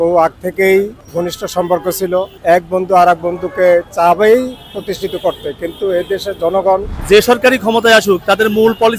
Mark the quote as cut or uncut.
cut